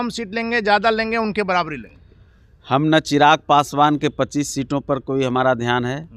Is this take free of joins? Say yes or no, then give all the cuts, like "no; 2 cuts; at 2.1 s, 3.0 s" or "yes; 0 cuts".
yes; 0 cuts